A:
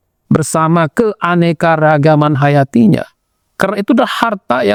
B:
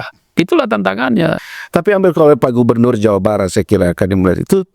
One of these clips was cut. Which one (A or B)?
B